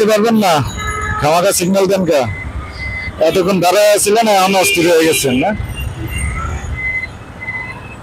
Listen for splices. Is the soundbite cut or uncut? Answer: uncut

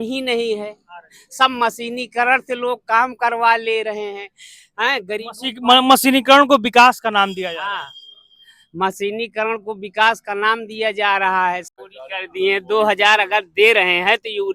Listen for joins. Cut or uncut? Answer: cut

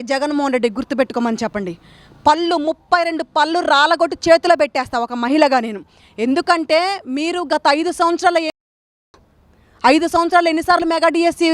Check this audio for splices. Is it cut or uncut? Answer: uncut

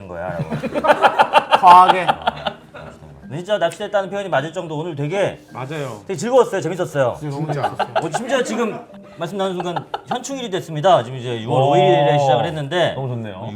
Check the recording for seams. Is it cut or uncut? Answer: uncut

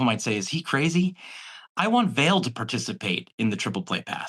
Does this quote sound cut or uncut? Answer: uncut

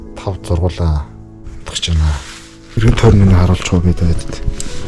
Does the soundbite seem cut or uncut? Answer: cut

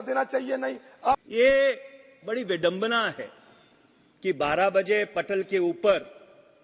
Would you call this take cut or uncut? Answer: cut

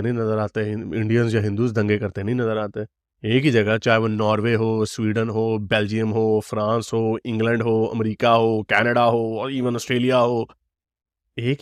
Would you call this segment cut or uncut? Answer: uncut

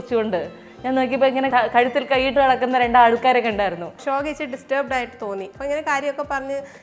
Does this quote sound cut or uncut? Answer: cut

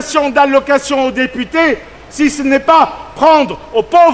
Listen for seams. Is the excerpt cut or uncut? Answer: uncut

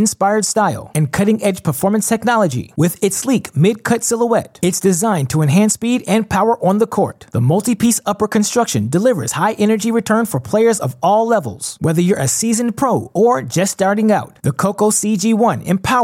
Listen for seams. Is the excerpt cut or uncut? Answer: uncut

